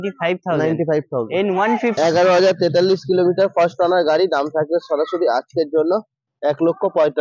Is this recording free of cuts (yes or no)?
no